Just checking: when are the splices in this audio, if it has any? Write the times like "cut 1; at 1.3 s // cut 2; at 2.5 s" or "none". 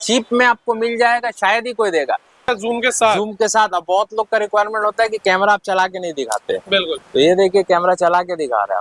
cut 1; at 2.4 s